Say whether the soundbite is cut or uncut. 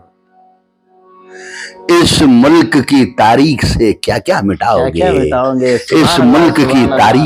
uncut